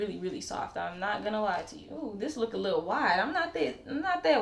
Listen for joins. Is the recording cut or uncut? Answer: cut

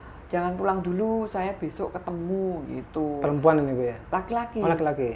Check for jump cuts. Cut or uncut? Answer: uncut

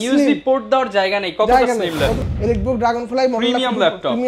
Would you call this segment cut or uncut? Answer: cut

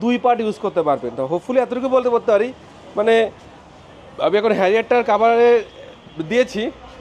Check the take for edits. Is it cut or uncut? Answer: uncut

